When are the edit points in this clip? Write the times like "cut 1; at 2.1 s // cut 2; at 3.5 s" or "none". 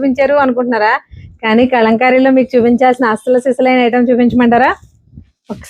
none